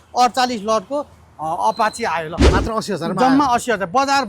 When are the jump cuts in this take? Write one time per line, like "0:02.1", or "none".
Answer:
0:02.4

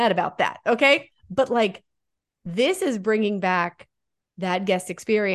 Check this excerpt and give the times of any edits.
0:01.1

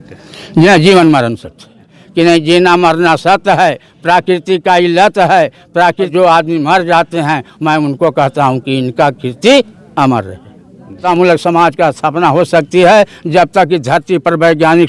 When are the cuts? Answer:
0:02.0
0:06.1
0:11.0

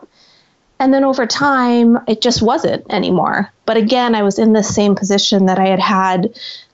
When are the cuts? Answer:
0:02.0
0:03.6

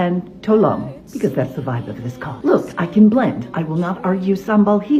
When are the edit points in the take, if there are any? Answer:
none

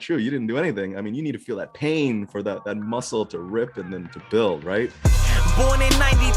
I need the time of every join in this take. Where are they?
0:05.0

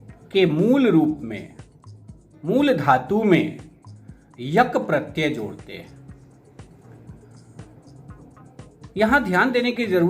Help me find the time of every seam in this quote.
none

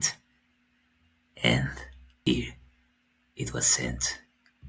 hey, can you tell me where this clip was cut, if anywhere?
0:02.2

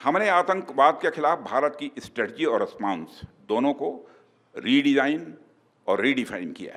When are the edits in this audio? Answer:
none

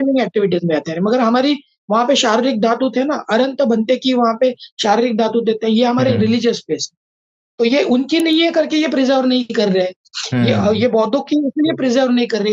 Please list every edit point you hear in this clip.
0:07.4

